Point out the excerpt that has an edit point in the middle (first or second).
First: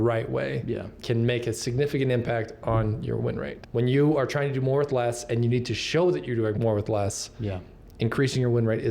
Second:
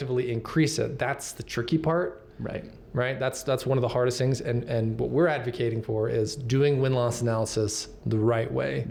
first